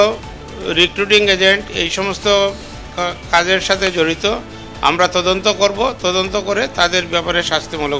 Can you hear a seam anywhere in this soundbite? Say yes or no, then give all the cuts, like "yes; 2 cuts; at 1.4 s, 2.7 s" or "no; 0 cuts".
no; 0 cuts